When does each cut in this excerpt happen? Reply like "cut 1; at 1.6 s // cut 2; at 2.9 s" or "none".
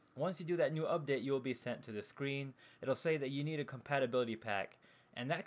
cut 1; at 1.1 s